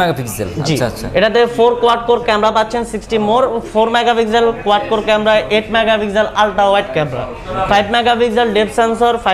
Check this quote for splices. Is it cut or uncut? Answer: uncut